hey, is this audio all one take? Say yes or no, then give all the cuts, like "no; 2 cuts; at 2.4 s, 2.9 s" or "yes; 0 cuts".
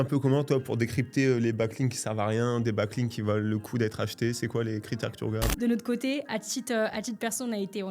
no; 1 cut; at 5.5 s